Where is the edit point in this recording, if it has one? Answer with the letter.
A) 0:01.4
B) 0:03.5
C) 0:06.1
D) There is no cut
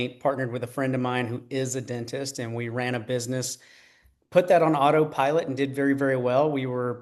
D